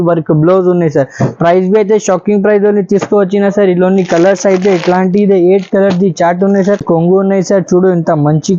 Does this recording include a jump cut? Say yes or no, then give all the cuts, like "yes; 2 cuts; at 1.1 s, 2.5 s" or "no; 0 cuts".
yes; 1 cut; at 6.8 s